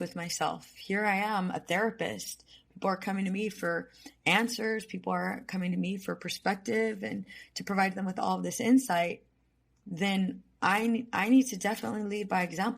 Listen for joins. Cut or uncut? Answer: uncut